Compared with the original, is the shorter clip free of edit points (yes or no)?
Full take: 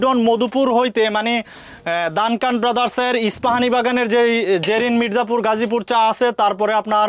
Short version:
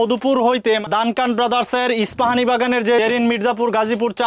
no